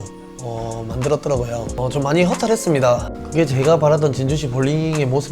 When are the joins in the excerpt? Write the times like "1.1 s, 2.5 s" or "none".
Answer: 3.1 s